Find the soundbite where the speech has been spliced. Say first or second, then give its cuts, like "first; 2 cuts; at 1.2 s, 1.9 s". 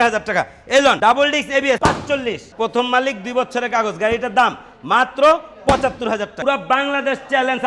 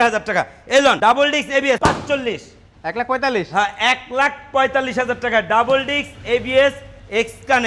first; 2 cuts; at 2.4 s, 6.3 s